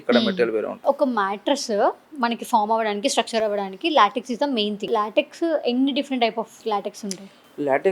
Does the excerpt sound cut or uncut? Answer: cut